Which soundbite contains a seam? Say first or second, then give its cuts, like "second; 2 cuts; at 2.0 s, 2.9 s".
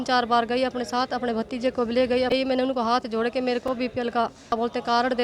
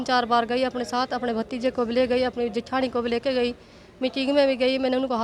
first; 2 cuts; at 2.3 s, 4.5 s